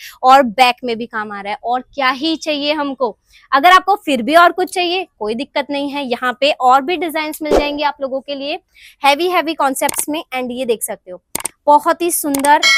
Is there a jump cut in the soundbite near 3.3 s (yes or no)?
no